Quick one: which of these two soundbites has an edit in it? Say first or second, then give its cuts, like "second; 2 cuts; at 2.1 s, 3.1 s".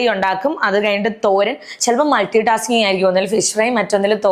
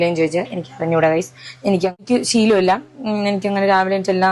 second; 1 cut; at 2.0 s